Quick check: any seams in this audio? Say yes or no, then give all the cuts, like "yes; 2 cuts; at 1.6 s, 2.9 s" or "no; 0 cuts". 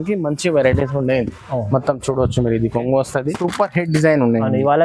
yes; 1 cut; at 3.4 s